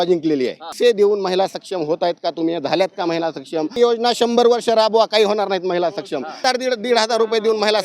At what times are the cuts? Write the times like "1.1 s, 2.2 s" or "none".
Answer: 0.7 s, 3.8 s, 6.4 s